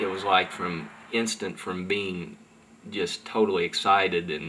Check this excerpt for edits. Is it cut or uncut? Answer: uncut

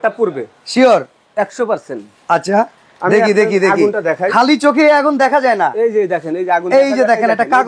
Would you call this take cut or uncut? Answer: uncut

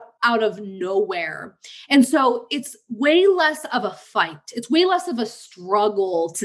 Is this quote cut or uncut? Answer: uncut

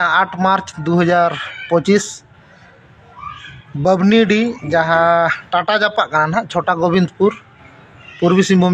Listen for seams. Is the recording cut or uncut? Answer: uncut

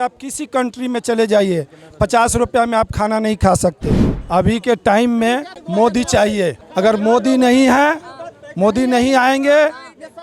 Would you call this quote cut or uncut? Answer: cut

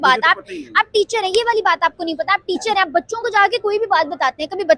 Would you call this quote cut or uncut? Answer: uncut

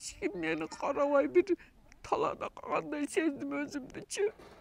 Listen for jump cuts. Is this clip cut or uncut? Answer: uncut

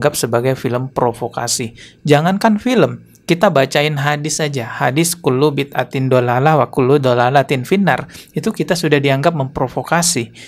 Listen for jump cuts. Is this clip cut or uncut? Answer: uncut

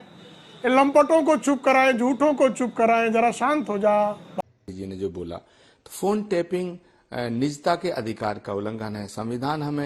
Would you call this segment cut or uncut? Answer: cut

